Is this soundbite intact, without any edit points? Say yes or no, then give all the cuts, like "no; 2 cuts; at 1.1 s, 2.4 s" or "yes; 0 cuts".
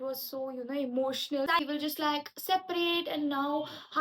no; 1 cut; at 1.6 s